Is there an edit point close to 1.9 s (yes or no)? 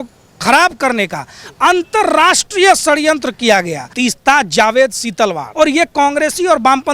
no